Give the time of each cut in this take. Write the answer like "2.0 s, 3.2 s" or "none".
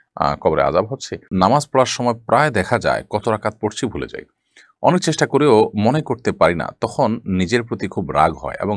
1.2 s